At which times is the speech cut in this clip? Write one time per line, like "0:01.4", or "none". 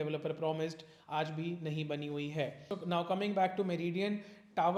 none